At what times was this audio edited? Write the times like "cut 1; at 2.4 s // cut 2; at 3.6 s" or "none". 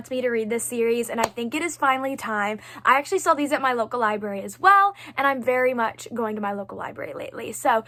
none